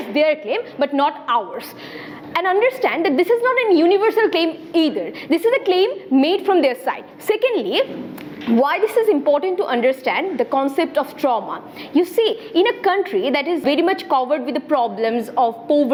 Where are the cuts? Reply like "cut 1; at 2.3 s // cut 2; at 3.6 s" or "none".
none